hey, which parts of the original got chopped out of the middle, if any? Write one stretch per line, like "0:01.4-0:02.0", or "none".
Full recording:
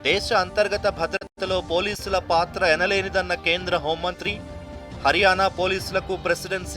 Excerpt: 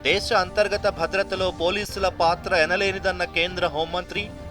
0:01.2-0:01.3